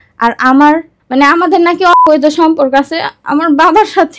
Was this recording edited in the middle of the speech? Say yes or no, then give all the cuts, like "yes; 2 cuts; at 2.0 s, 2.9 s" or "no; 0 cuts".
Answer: no; 0 cuts